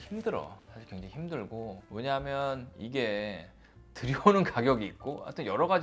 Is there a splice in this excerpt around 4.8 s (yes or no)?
no